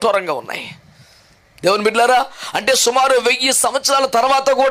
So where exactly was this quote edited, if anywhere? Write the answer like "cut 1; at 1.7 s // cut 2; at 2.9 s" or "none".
none